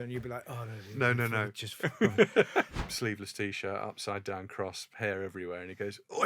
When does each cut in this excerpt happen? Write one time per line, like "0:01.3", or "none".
0:02.7